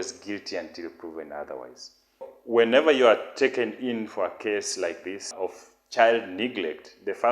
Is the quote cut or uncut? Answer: cut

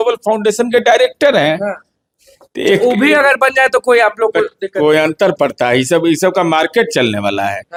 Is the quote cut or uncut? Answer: uncut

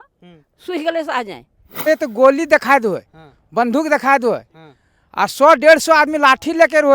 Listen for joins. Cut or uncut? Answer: cut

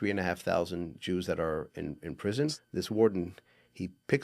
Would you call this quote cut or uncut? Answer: cut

